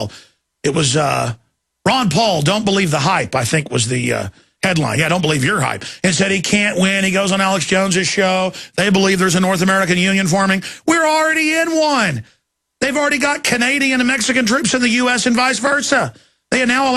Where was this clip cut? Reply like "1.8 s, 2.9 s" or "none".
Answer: none